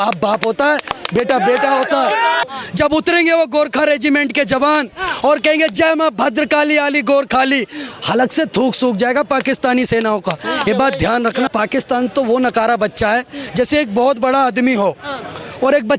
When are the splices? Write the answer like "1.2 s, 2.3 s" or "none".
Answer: 2.4 s, 11.5 s